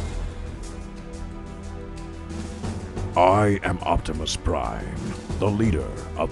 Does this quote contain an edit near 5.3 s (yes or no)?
no